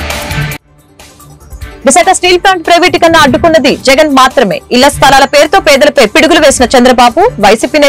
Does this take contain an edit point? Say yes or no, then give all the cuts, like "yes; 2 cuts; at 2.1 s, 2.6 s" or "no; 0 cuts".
yes; 1 cut; at 1.7 s